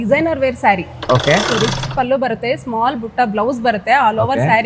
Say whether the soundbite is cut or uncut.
cut